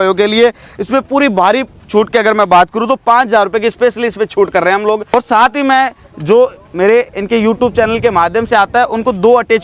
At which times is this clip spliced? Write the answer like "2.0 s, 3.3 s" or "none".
5.1 s